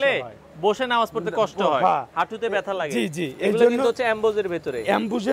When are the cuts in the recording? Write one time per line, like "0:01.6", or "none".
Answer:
none